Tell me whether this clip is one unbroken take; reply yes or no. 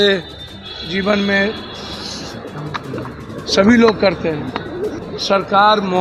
no